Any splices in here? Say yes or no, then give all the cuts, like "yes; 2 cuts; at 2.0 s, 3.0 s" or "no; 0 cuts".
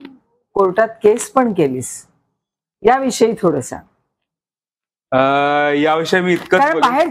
no; 0 cuts